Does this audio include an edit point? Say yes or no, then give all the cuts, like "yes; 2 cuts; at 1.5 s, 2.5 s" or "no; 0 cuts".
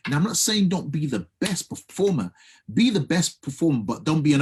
no; 0 cuts